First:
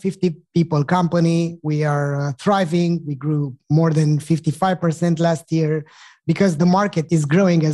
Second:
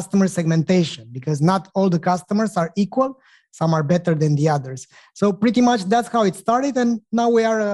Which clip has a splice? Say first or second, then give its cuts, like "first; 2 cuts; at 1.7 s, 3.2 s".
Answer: first; 1 cut; at 6.6 s